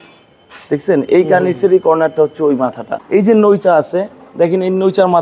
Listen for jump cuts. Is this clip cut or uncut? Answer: cut